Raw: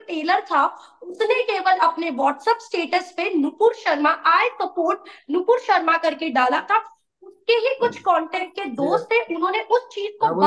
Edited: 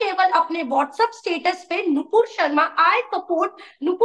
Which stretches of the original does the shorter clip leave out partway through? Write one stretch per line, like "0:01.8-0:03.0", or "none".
none

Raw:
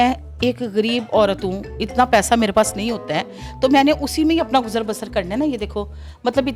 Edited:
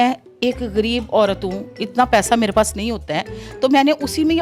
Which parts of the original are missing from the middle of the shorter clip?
none

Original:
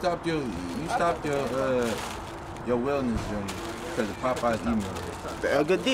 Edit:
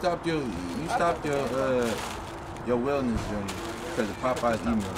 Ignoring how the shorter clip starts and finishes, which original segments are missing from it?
none

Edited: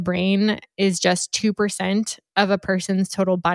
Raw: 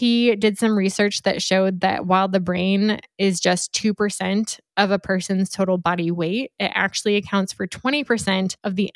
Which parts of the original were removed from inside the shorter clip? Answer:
none

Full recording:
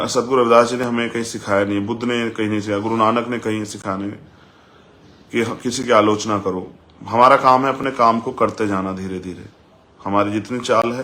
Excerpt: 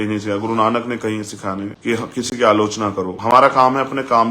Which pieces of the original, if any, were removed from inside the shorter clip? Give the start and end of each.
0:04.2-0:05.2
0:06.6-0:07.0

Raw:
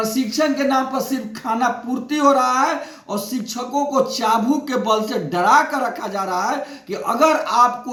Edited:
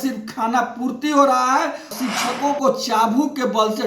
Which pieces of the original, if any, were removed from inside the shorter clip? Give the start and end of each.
0:02.9-0:03.2

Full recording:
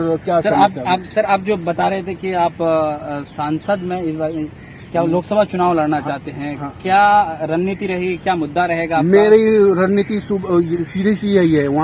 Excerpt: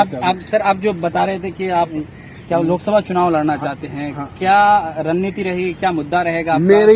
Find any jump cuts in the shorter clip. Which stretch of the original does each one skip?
0:02.5-0:04.3

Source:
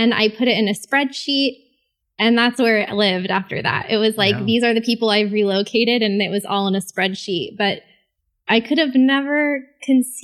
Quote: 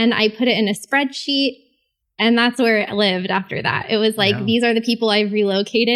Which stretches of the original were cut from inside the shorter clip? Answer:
none

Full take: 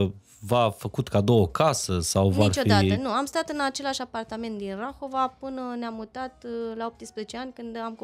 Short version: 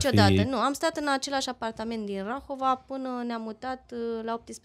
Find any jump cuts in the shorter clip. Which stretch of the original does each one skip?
none

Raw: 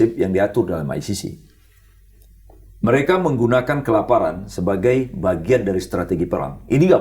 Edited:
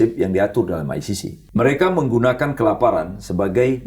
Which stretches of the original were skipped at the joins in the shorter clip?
0:01.3-0:02.6

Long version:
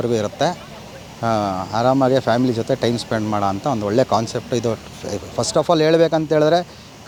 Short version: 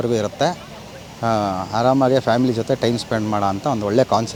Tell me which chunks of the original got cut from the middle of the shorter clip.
none

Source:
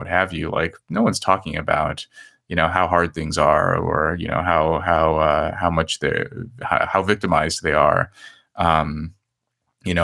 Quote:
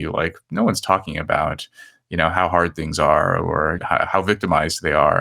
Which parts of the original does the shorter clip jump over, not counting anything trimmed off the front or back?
0:04.2-0:06.6

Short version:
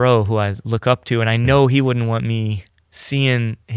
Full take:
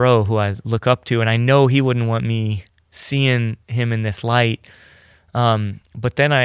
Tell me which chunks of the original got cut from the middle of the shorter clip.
none

